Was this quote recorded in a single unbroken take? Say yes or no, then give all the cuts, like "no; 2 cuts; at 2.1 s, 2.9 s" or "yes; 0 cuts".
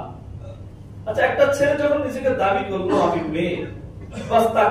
yes; 0 cuts